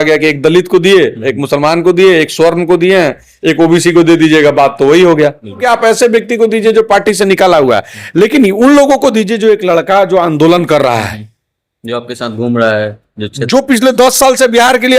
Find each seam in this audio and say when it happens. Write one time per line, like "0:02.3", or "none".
0:05.6